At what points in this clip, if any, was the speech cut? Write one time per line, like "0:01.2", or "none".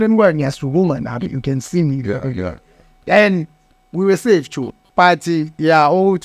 none

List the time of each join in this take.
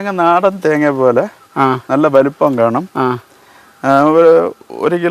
none

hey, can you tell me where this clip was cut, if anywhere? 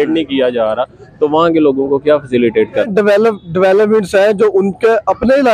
0:02.9

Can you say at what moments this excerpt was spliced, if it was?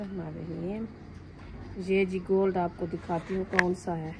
0:01.6

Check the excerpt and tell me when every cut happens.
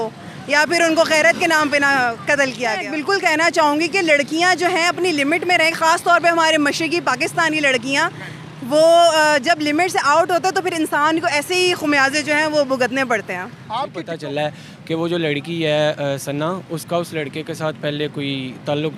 0:02.9
0:14.1

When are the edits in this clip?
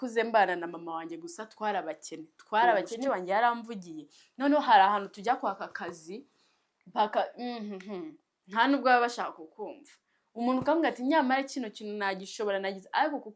0:03.0

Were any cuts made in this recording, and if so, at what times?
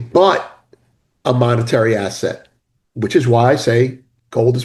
none

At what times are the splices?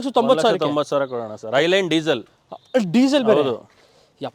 none

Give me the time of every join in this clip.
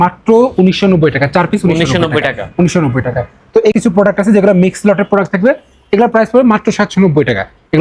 0:03.7

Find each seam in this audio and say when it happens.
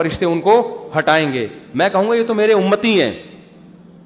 none

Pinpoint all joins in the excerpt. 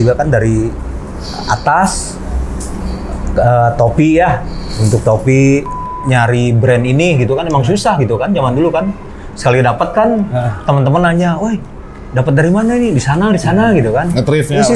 0:05.8

